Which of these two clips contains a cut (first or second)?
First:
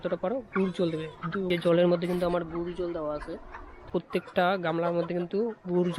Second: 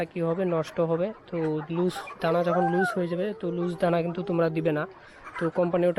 first